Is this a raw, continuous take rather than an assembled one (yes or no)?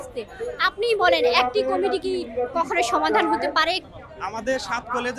no